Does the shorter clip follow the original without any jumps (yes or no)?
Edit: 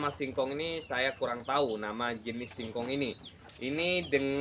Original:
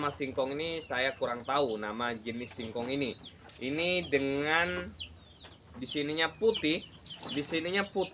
yes